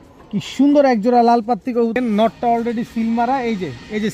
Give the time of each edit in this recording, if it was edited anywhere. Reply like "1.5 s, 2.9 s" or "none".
1.9 s